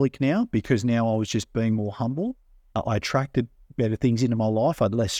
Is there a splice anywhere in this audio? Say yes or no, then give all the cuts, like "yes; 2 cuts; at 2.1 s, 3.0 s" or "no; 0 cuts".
yes; 1 cut; at 2.8 s